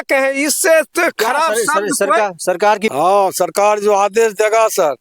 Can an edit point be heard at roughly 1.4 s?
no; 1 cut; at 2.9 s

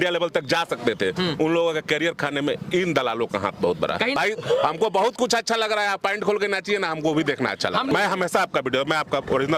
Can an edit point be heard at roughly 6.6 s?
no; 2 cuts; at 4.2 s, 7.9 s

